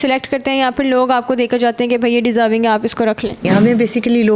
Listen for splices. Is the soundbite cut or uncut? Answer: cut